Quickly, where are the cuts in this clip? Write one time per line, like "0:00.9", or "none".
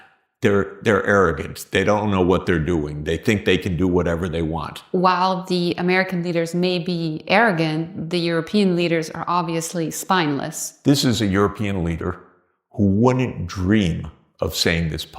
0:04.7
0:10.7

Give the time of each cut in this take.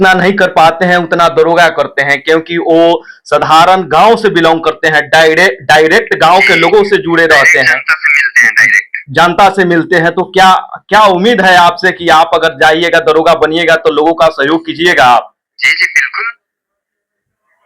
none

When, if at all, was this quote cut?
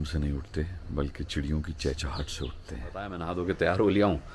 0:03.2

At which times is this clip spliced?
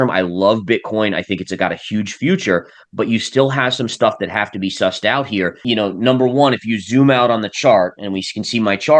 0:05.6

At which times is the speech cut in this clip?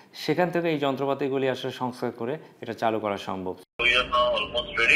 0:03.6

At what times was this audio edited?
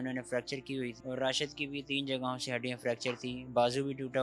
0:01.0

